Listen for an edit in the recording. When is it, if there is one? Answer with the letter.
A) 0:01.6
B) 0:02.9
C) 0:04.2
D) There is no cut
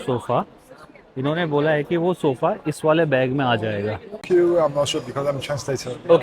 C